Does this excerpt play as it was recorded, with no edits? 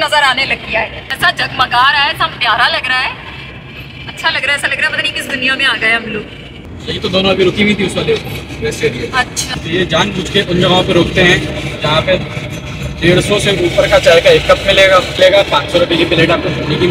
no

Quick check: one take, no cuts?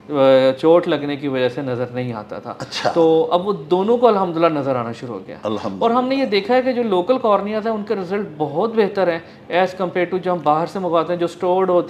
yes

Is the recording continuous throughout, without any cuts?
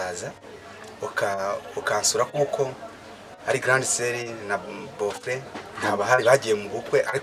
yes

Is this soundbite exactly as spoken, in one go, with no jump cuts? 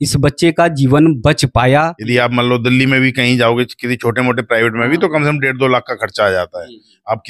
no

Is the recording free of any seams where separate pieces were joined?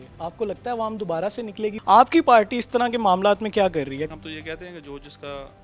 no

